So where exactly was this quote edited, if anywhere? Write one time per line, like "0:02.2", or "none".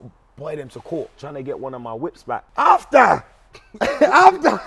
0:01.2
0:02.5